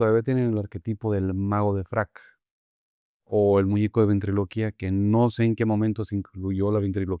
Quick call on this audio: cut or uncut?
uncut